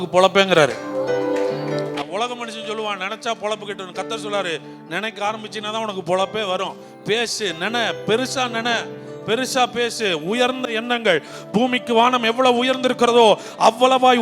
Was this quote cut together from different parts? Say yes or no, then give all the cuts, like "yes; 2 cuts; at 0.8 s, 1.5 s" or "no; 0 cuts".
no; 0 cuts